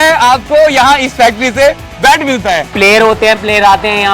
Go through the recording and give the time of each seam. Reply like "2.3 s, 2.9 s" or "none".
2.7 s